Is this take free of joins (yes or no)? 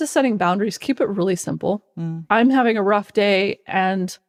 yes